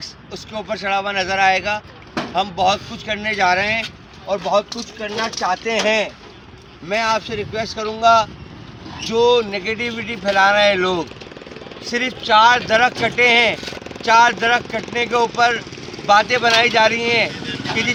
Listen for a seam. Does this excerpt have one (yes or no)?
no